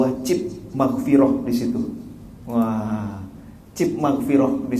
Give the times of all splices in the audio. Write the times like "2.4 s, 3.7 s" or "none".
none